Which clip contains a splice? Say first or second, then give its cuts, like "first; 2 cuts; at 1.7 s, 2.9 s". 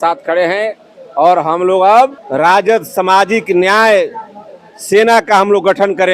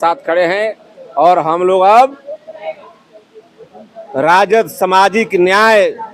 first; 1 cut; at 2.2 s